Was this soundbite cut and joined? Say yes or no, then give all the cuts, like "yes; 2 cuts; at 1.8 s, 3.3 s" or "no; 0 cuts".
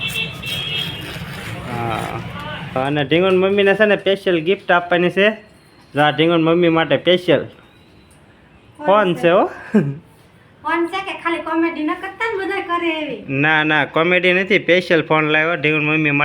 yes; 1 cut; at 2.8 s